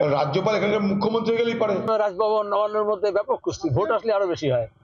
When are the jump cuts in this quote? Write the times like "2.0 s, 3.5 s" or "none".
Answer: 1.9 s